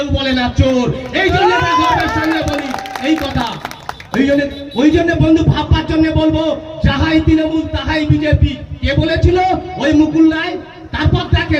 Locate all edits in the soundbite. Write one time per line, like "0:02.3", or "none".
none